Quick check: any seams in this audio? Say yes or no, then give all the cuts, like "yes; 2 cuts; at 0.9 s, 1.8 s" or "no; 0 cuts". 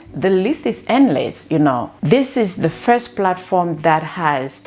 no; 0 cuts